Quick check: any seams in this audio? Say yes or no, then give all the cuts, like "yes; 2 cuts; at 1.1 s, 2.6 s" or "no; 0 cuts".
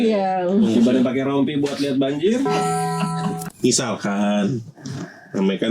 yes; 1 cut; at 3.5 s